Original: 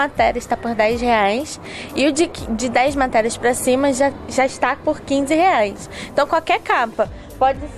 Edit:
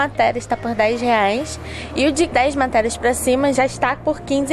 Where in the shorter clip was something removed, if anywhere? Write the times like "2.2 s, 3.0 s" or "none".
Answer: 2.3 s, 3.5 s